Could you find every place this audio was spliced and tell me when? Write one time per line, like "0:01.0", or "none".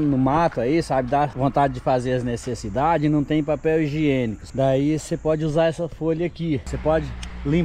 0:01.3
0:04.4
0:06.7